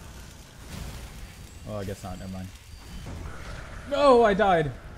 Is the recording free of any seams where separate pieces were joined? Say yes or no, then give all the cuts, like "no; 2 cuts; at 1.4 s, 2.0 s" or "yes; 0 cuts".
no; 1 cut; at 3.1 s